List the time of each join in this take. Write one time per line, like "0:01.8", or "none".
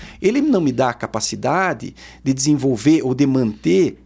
none